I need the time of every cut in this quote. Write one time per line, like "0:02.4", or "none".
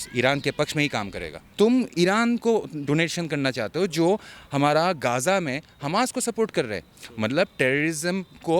0:01.4